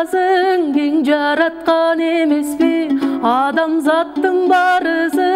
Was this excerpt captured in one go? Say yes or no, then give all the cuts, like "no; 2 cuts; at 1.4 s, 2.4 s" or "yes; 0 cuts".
yes; 0 cuts